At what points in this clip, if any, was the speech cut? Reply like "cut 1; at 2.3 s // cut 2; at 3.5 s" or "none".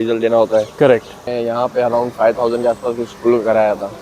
cut 1; at 1.2 s

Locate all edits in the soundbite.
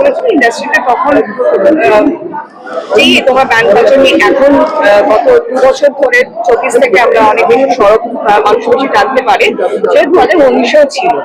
none

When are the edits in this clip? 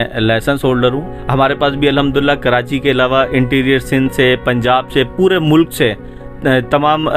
cut 1; at 1.1 s

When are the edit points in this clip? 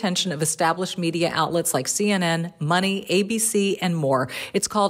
none

